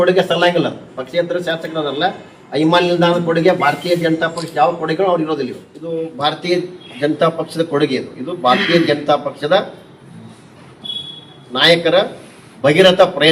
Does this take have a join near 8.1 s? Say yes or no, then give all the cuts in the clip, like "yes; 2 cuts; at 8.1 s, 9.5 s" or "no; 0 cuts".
no; 1 cut; at 5.7 s